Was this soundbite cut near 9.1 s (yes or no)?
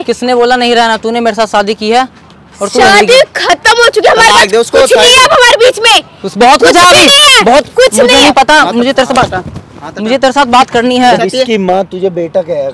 no